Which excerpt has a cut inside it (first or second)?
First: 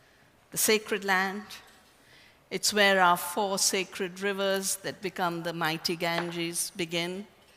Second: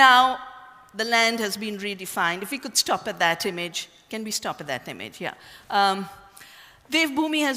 first